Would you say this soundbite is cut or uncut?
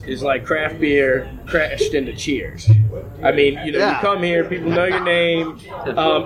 uncut